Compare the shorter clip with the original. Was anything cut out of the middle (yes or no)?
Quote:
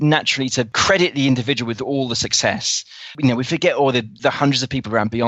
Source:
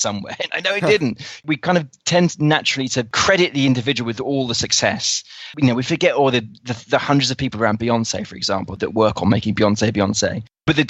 yes